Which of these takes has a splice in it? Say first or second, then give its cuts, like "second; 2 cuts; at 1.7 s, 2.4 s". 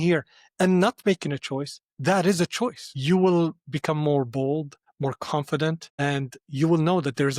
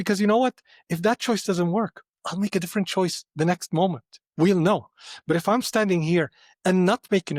first; 3 cuts; at 2.9 s, 4.8 s, 5.9 s